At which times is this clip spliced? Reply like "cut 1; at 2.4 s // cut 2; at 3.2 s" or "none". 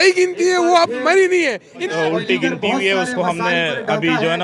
cut 1; at 1.9 s